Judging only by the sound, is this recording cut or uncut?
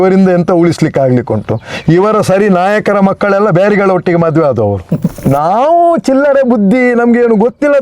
cut